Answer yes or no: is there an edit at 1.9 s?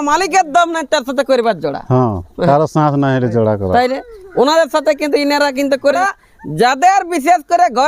no